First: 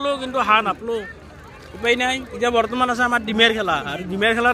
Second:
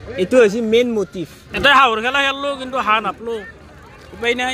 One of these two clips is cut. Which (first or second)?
second